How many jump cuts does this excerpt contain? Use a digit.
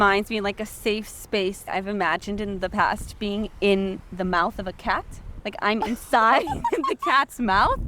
2